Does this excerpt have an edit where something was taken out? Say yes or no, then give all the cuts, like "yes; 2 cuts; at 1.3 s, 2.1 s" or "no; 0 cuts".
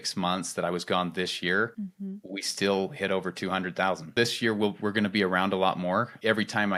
no; 0 cuts